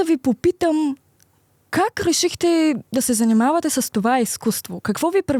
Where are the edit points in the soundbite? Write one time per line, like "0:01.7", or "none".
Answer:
none